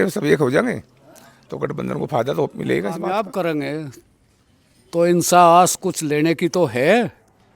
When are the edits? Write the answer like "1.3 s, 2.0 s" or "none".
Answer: 3.0 s